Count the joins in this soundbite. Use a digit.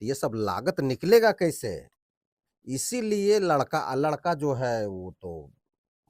0